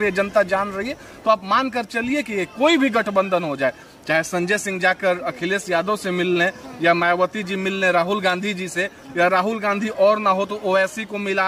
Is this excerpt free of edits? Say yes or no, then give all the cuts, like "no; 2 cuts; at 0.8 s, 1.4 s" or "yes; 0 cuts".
yes; 0 cuts